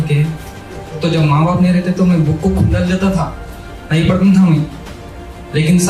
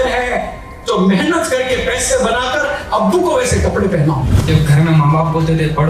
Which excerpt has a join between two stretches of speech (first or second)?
second